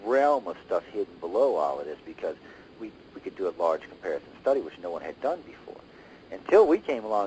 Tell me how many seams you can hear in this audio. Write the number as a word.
one